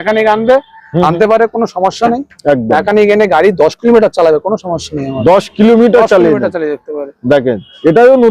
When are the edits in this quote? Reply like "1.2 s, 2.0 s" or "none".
none